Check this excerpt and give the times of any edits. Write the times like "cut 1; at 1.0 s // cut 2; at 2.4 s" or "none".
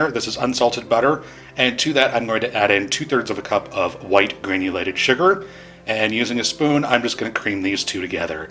none